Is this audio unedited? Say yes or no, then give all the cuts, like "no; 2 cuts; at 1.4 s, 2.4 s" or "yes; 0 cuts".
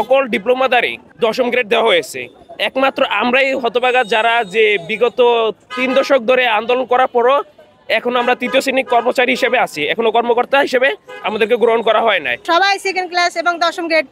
no; 2 cuts; at 1.0 s, 12.4 s